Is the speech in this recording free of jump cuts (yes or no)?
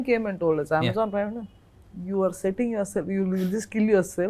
yes